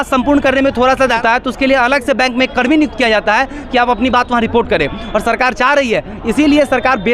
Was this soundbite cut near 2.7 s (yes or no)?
no